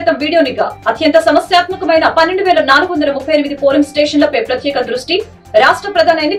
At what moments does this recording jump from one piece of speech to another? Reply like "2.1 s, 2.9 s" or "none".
none